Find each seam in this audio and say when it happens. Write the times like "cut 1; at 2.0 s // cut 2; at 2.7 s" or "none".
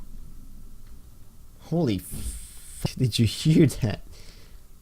cut 1; at 2.8 s